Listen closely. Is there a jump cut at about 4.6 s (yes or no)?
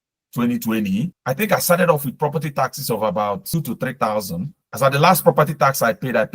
yes